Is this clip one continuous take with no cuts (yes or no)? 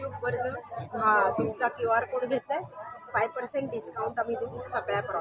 yes